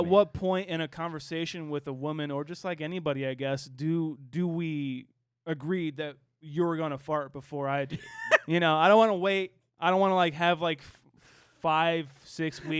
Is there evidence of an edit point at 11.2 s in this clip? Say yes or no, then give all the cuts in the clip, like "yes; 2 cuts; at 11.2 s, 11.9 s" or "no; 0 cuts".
no; 1 cut; at 8.1 s